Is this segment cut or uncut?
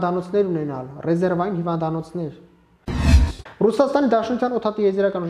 cut